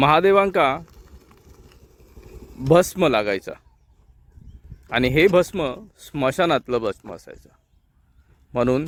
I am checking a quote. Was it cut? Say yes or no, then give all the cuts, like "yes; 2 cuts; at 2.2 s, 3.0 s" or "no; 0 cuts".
no; 0 cuts